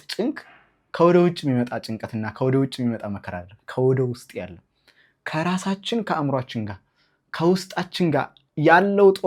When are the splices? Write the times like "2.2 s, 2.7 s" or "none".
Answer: none